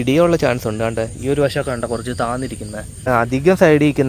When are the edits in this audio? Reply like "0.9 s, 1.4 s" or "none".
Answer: 3.0 s